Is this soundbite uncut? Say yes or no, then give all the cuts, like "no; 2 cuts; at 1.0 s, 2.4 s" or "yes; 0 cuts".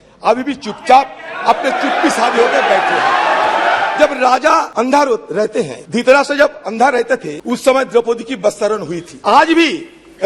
no; 5 cuts; at 3.9 s, 4.7 s, 5.8 s, 7.3 s, 9.1 s